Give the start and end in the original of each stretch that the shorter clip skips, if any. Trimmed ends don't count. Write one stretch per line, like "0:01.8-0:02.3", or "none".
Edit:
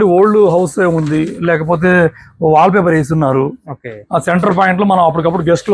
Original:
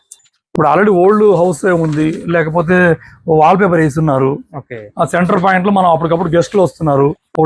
none